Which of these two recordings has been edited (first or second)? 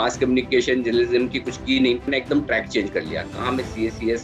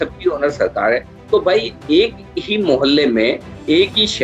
first